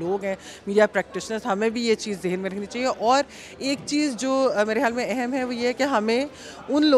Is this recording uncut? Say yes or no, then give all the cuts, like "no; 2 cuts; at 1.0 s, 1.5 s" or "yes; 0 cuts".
yes; 0 cuts